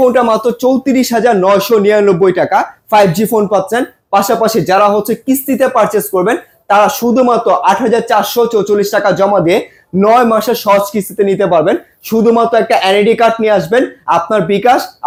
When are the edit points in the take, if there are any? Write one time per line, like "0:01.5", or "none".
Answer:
none

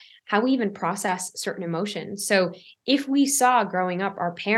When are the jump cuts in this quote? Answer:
none

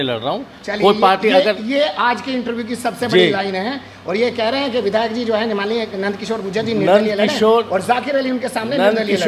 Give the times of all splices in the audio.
none

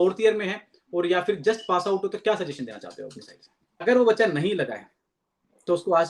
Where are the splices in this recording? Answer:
0:03.8

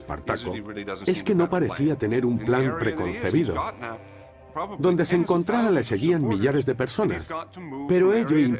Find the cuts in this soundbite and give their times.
none

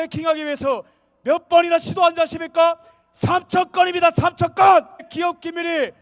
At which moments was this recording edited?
0:05.1

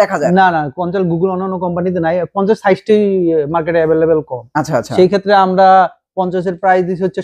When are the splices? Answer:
none

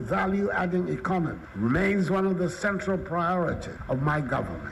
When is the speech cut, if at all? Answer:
0:03.7

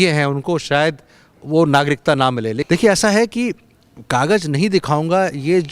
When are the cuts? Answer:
0:02.6

